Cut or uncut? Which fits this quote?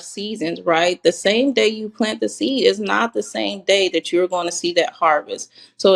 uncut